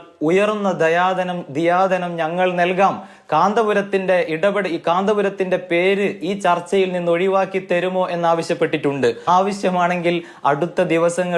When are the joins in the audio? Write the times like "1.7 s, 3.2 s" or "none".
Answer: 9.3 s